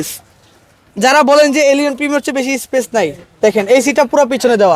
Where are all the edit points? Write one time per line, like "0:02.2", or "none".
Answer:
none